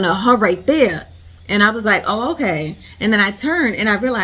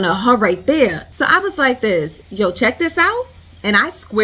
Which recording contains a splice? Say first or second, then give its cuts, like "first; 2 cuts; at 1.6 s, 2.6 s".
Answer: second; 1 cut; at 1.1 s